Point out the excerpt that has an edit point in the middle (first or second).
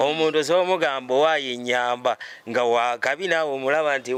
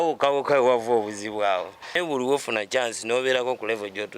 second